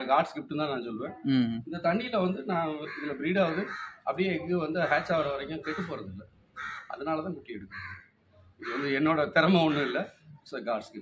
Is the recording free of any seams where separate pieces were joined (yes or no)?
yes